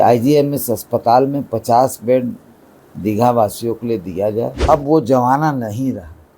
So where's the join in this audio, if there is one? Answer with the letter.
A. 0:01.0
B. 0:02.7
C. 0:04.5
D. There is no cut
C